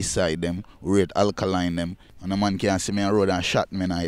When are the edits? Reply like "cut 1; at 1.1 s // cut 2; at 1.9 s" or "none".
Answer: cut 1; at 2.1 s